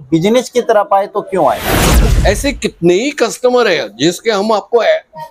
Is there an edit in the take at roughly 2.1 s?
yes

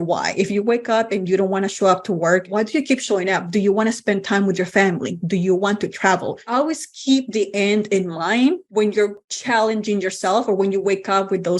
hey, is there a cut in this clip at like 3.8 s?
no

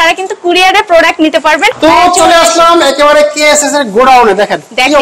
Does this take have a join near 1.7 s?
yes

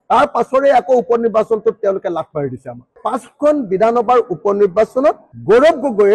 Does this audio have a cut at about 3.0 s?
yes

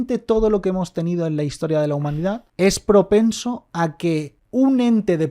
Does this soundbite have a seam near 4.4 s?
yes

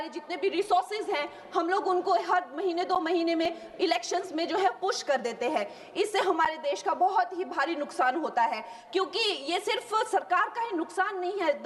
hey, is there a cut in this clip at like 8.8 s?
yes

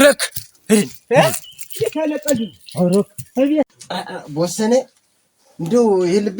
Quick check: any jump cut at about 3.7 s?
yes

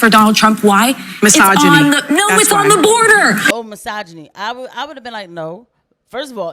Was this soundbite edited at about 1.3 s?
no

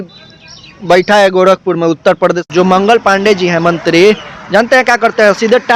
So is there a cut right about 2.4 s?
yes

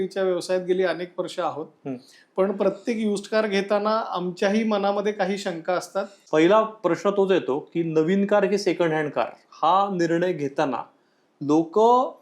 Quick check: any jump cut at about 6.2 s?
yes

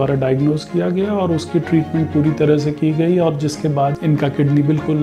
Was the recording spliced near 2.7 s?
no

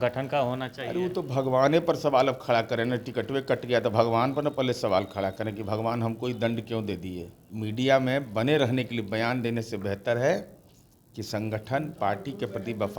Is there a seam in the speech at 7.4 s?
yes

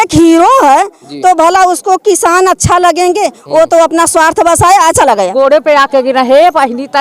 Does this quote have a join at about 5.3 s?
yes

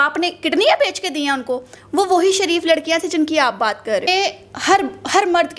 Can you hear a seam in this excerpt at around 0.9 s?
no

